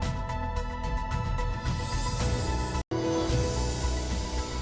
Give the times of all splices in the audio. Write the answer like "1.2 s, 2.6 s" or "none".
1.7 s